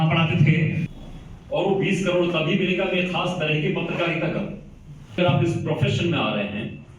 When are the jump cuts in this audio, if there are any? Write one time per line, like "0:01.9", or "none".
0:00.9
0:05.2